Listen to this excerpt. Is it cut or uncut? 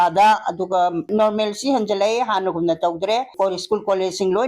cut